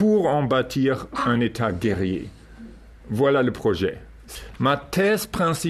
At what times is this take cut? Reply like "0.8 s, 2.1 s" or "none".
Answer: 4.2 s